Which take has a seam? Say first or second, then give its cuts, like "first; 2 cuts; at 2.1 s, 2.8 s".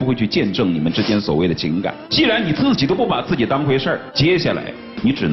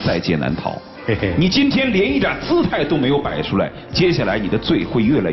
first; 2 cuts; at 2.0 s, 4.1 s